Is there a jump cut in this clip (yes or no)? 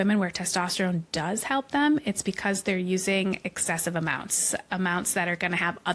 no